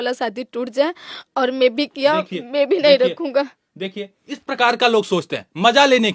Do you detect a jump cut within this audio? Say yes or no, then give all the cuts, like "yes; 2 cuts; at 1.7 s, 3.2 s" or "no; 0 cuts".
no; 0 cuts